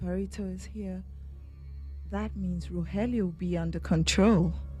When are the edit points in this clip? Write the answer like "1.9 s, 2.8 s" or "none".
none